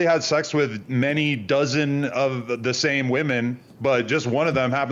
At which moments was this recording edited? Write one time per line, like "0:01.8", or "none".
none